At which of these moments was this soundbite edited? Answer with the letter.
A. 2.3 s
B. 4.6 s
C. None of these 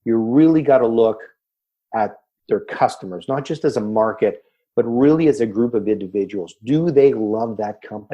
A